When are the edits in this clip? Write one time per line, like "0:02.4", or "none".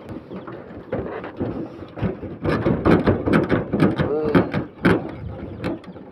none

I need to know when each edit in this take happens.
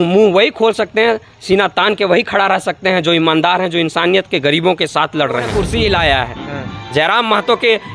0:05.6

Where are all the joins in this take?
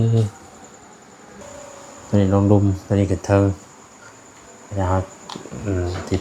0:01.4

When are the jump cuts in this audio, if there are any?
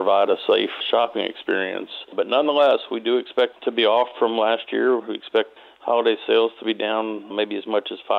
0:00.8
0:02.1
0:03.6
0:05.5
0:07.3

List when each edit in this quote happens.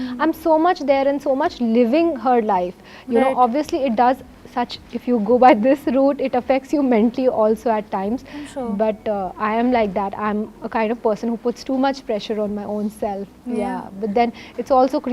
none

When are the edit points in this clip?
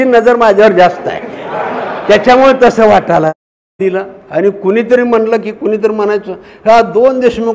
0:03.8

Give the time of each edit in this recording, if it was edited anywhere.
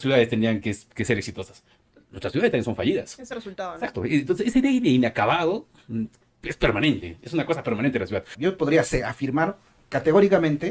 0:08.3

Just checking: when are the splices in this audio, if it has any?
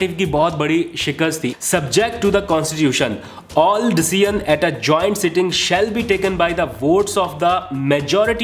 0:01.5

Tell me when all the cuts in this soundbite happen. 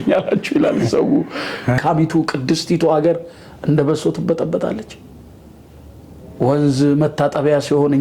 0:01.8

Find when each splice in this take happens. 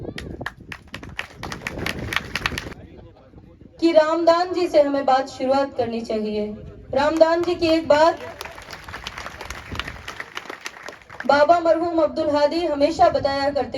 0:02.7

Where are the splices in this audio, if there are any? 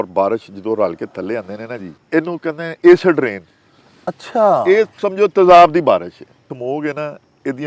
0:01.9
0:06.5

